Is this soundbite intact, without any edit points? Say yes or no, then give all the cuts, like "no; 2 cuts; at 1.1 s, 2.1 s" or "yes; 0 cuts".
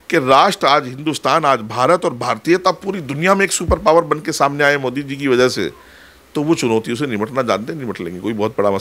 yes; 0 cuts